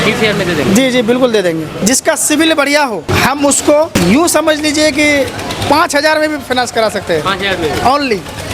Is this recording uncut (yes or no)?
no